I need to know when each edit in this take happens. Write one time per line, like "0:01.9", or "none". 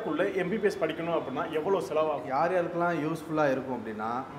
0:02.2